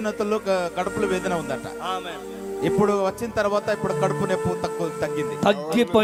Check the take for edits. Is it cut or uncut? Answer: uncut